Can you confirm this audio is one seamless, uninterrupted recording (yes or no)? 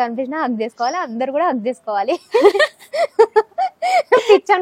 yes